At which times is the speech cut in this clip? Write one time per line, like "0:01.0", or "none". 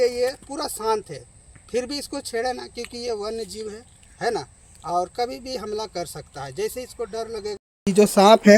0:07.7